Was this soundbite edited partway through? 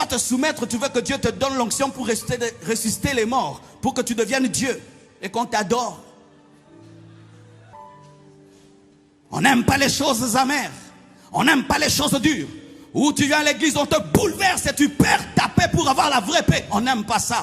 yes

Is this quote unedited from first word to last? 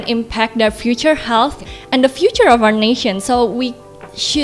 yes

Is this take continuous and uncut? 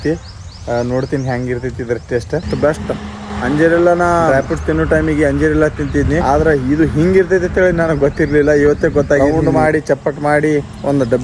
no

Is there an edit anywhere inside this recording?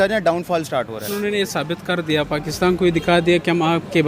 yes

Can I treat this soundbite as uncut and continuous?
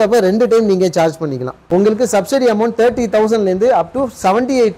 no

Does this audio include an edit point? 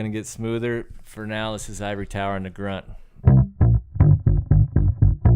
yes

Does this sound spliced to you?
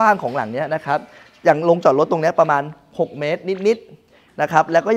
no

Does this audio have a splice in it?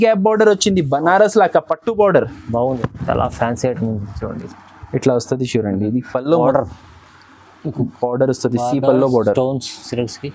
yes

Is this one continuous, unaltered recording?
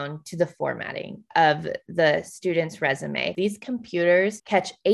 no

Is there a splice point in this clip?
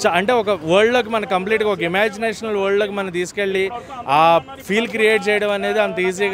no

